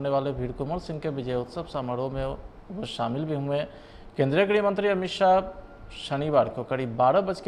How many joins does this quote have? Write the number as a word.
zero